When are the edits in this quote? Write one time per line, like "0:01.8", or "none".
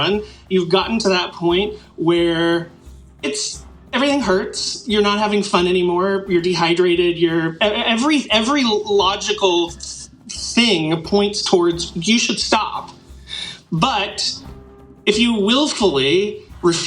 none